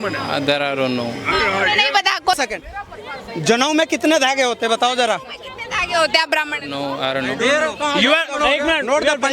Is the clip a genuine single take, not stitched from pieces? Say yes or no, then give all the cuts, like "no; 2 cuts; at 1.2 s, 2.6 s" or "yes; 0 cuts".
no; 1 cut; at 2.3 s